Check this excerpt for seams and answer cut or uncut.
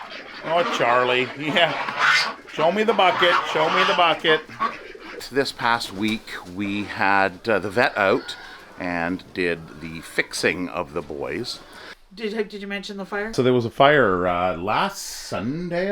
cut